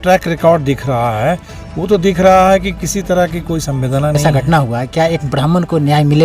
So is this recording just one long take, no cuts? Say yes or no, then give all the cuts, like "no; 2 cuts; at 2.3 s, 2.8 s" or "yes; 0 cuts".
no; 1 cut; at 4.2 s